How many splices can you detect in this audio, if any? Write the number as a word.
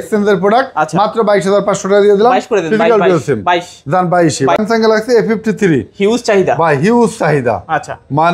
one